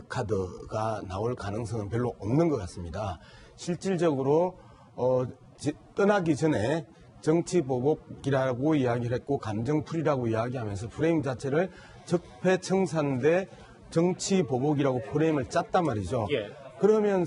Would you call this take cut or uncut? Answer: cut